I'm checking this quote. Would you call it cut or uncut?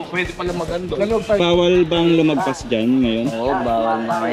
cut